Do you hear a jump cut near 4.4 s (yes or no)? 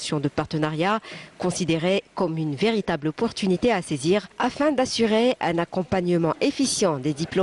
yes